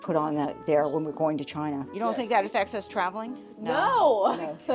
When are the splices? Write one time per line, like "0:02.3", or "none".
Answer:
0:02.0